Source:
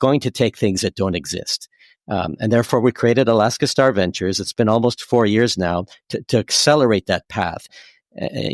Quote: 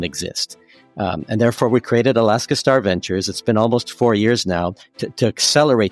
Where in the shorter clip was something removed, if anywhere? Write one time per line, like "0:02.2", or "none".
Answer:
none